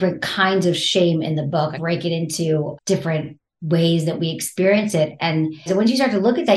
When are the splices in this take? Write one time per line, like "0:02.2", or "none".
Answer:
0:01.8
0:03.1
0:05.6